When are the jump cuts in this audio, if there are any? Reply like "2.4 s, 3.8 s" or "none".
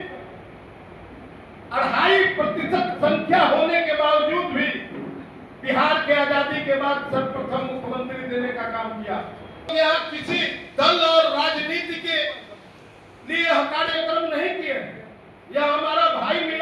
9.7 s